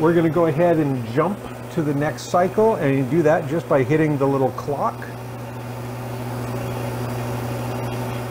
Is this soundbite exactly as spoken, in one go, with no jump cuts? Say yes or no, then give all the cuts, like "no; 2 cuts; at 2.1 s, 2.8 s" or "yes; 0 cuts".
yes; 0 cuts